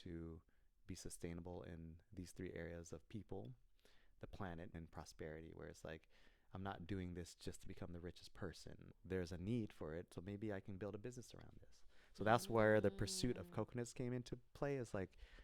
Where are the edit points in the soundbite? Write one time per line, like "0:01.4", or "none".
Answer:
0:04.7
0:08.9